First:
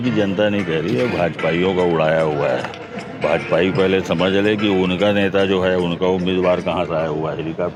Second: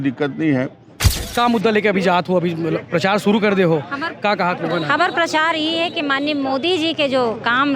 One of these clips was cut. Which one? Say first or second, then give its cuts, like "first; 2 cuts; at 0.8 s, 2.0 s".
second; 1 cut; at 1.0 s